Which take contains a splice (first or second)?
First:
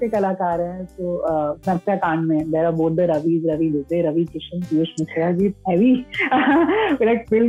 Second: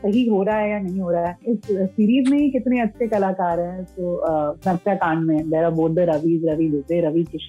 second